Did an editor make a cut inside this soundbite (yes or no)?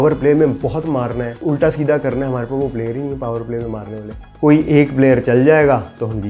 yes